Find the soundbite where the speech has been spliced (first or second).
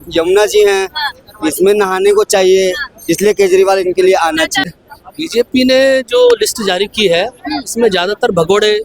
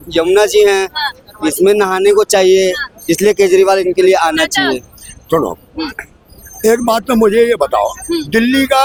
first